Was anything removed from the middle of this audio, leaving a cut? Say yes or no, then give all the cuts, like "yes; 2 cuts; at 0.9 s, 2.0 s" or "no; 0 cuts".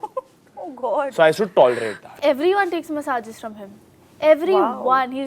yes; 1 cut; at 2.1 s